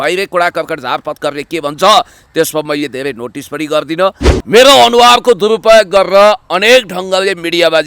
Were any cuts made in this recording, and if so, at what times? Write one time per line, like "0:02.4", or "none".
0:04.3